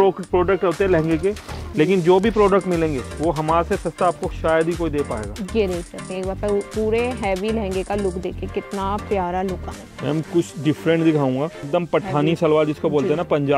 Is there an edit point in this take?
yes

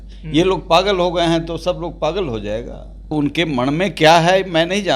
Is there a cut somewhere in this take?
yes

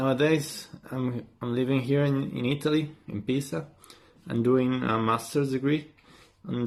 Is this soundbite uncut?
yes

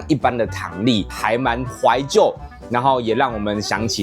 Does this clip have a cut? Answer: yes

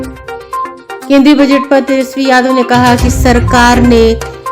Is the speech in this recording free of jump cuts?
no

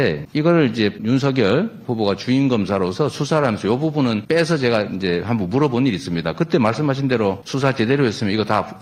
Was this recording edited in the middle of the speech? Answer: no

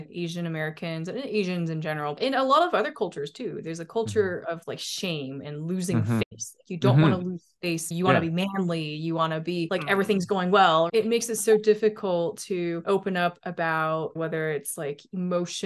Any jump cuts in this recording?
yes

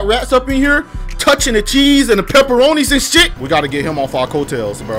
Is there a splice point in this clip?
yes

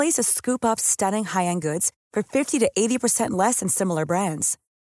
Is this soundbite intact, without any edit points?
yes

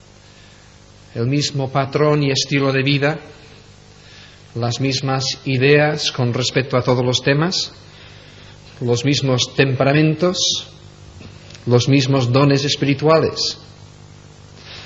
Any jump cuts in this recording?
yes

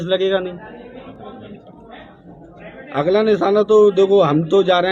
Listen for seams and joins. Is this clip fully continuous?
no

